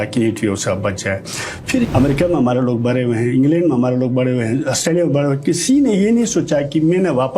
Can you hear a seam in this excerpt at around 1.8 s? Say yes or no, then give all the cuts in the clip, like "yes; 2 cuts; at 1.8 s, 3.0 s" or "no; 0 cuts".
yes; 1 cut; at 1.8 s